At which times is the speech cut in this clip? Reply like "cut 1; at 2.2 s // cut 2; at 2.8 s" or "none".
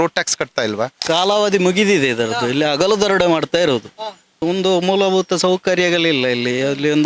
cut 1; at 1.0 s